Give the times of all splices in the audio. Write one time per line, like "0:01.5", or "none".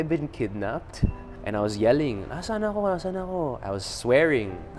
0:01.3